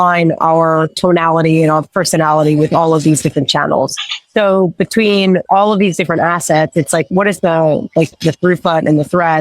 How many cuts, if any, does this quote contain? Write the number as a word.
three